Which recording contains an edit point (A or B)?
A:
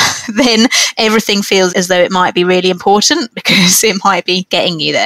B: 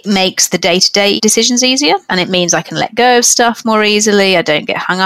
B